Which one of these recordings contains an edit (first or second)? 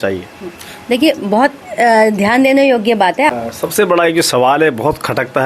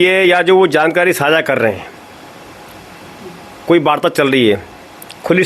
first